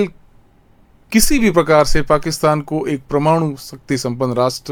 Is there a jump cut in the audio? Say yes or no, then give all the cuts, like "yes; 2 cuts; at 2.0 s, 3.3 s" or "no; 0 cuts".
no; 0 cuts